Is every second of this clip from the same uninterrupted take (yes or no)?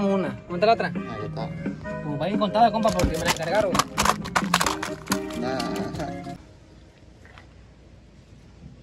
no